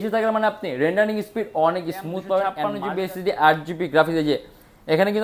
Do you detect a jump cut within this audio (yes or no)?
yes